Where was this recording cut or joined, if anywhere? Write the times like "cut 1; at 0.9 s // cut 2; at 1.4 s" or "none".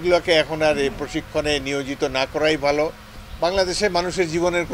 cut 1; at 3.0 s